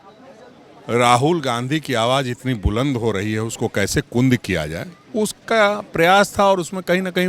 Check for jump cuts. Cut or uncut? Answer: uncut